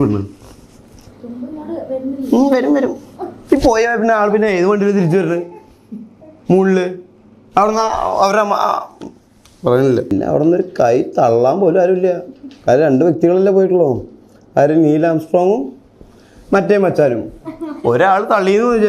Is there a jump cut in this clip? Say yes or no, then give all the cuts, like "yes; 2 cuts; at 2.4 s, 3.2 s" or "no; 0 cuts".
yes; 1 cut; at 10.1 s